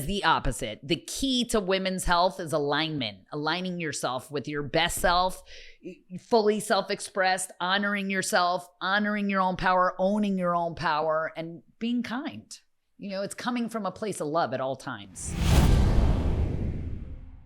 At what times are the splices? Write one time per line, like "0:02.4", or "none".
0:15.4

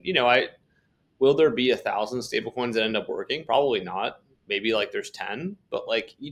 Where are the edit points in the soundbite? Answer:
none

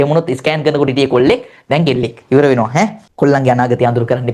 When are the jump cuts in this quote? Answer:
0:03.0

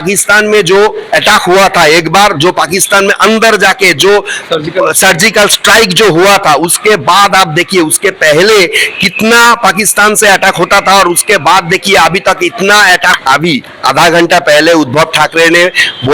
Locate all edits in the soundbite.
0:13.1

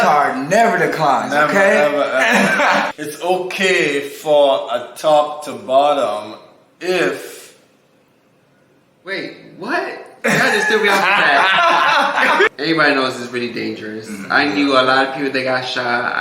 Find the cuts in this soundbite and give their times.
0:02.9
0:12.5

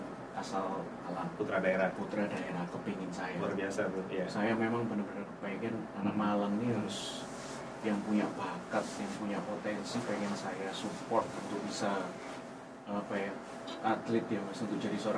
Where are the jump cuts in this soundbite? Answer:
none

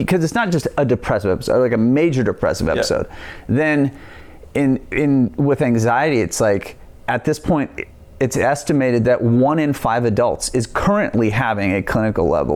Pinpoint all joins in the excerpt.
none

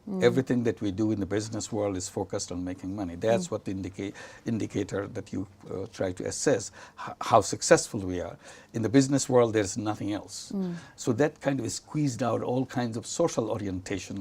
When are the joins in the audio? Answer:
0:03.6

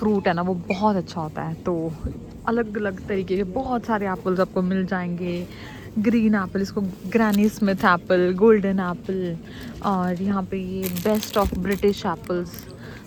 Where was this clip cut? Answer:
none

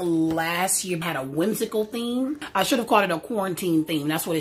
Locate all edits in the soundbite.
0:01.0
0:02.4

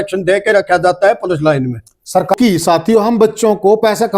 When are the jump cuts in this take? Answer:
0:02.3

